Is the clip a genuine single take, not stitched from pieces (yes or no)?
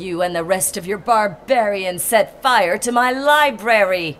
yes